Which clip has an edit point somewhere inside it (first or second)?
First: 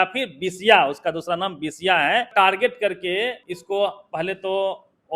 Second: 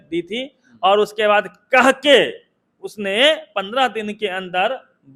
first